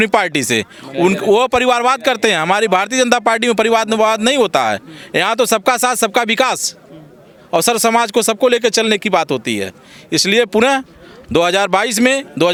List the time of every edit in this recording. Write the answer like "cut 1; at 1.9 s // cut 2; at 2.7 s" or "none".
none